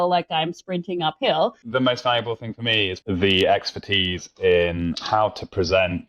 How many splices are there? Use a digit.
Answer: 2